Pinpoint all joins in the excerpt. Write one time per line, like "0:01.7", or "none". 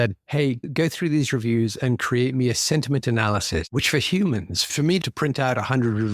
0:03.7
0:05.0